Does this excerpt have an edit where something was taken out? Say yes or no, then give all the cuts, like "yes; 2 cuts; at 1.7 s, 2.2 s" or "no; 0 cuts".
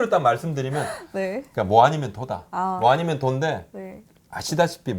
no; 0 cuts